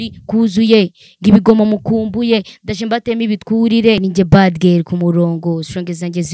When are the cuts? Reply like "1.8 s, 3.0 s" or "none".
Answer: 4.0 s

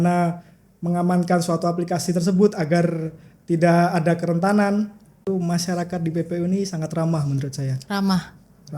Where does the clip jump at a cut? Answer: 5.3 s

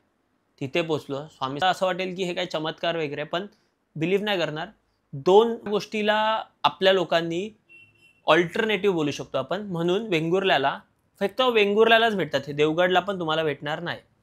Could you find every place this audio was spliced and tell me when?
1.6 s, 5.7 s

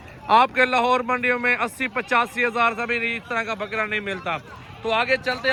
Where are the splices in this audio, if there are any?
none

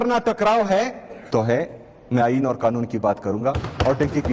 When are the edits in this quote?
1.1 s

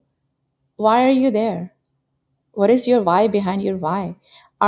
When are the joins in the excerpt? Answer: none

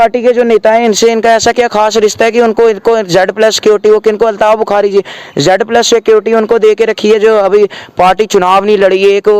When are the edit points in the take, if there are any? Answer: none

